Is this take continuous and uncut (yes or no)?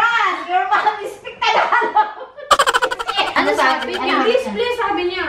no